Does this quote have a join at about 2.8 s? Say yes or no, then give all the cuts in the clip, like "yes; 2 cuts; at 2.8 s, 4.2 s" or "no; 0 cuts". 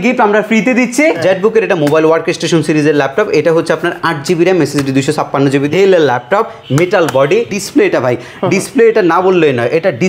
no; 3 cuts; at 1.2 s, 5.7 s, 7.5 s